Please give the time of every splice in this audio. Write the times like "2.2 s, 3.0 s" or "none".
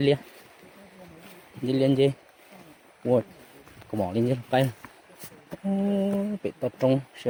none